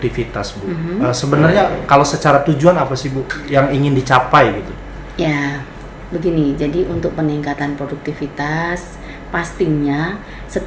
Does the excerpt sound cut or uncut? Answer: uncut